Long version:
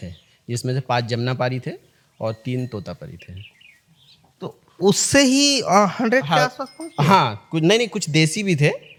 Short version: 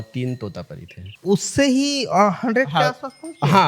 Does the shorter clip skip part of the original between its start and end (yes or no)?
yes